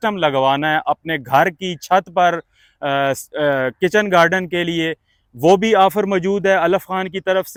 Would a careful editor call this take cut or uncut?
uncut